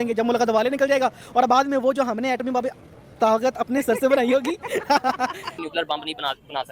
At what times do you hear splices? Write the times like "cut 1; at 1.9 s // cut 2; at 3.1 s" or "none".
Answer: cut 1; at 5.5 s